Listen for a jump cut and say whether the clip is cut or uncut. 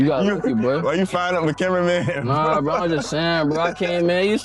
uncut